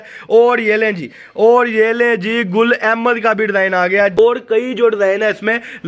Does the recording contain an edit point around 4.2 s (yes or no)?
yes